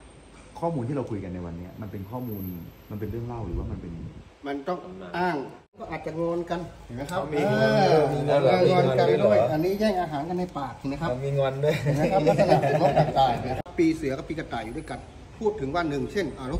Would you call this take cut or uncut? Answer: cut